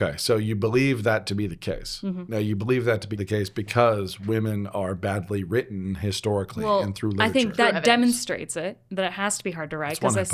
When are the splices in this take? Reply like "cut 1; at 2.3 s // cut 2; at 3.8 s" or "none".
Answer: cut 1; at 2.2 s // cut 2; at 3.1 s